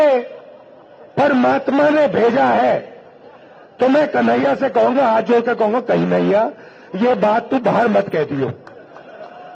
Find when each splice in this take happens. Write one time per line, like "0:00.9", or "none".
none